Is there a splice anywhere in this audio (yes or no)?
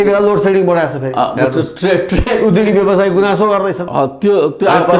no